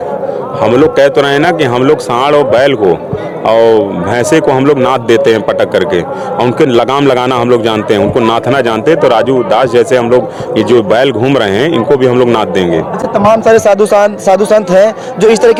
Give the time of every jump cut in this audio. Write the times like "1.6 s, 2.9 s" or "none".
none